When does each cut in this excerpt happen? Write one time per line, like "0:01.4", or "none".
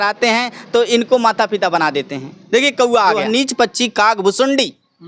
0:03.2